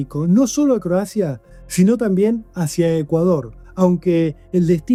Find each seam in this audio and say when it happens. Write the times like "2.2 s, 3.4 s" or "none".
none